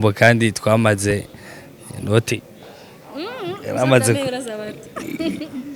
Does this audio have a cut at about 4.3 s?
no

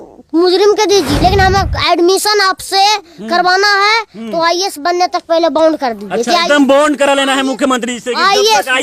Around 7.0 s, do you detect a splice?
no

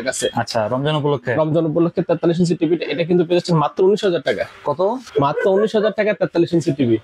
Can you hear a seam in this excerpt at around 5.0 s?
yes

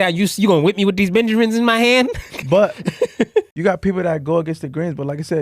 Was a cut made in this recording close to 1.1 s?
no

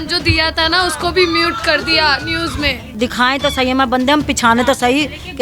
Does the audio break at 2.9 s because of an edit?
yes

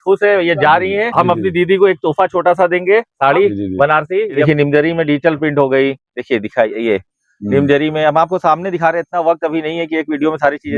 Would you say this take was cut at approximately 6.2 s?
no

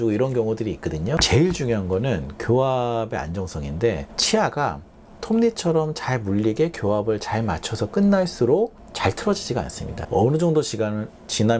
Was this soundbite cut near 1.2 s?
yes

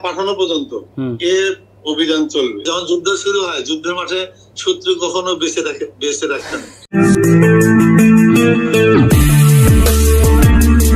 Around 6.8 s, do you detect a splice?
yes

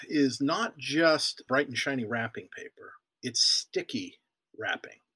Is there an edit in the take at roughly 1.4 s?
yes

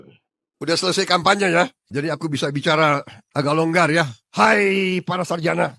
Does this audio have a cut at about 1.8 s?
no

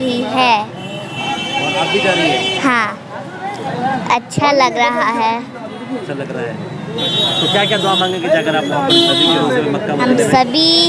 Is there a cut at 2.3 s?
no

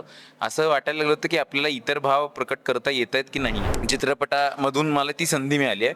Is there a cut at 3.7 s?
yes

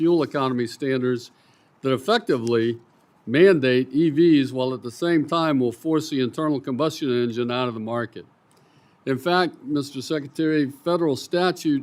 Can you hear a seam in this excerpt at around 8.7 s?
no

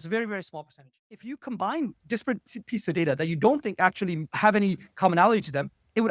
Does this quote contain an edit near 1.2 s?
yes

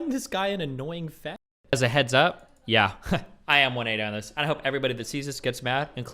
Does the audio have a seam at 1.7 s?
yes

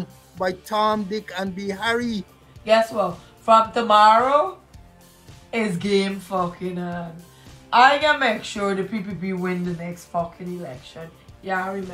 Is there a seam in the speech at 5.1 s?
no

